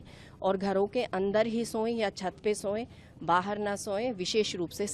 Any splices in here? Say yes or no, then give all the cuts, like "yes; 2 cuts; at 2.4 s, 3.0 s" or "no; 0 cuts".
no; 0 cuts